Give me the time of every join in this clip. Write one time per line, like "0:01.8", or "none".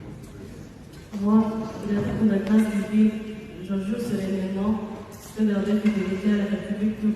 0:03.8